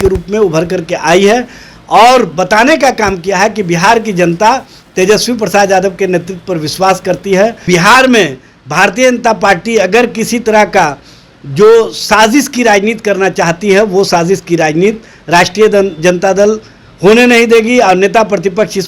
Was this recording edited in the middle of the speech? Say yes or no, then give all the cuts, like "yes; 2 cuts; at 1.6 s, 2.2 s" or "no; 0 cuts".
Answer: yes; 1 cut; at 7.7 s